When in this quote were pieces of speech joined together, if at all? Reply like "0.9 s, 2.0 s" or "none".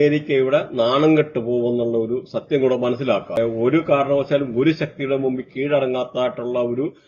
3.4 s